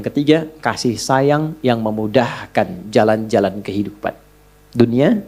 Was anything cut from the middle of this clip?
no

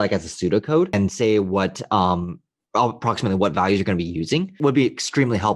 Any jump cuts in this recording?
yes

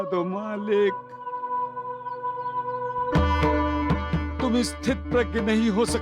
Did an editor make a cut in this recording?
no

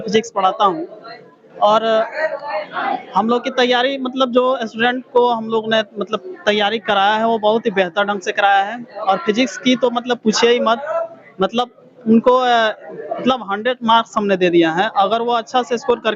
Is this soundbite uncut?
yes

